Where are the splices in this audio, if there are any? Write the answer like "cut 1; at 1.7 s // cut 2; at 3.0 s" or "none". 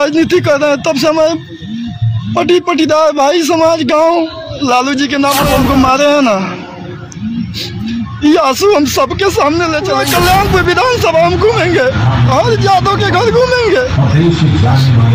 cut 1; at 5.4 s // cut 2; at 10.0 s